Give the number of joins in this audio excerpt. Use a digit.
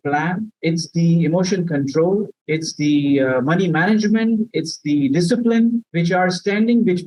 0